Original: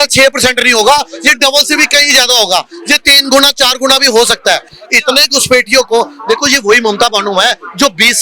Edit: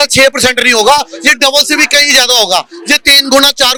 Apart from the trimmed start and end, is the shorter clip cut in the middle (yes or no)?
no